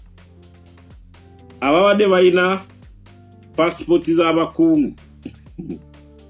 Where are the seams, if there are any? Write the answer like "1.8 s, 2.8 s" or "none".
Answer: none

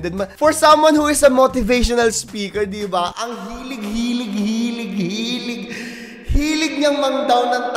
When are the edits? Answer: none

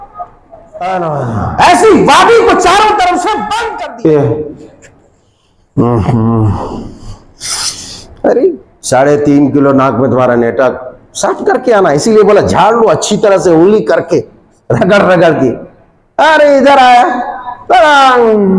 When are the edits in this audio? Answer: 3.6 s

